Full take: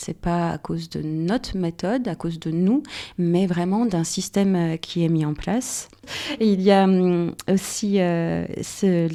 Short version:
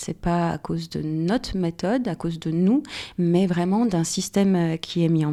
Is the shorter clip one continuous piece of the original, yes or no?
yes